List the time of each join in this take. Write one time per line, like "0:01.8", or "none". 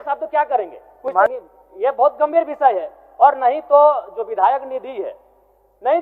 0:01.1